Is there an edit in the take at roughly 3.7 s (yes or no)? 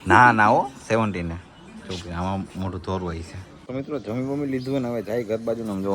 yes